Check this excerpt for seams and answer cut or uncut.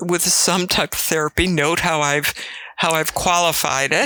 uncut